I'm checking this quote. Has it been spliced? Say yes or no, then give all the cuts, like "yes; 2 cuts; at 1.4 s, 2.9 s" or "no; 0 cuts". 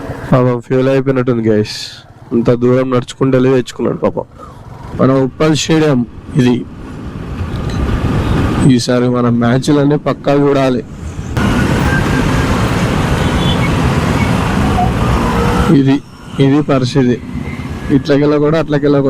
yes; 2 cuts; at 4.9 s, 11.3 s